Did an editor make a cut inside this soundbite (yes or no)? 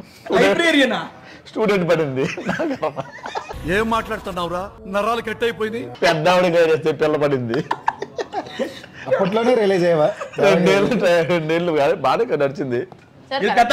no